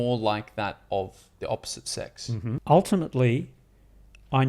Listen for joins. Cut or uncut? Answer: cut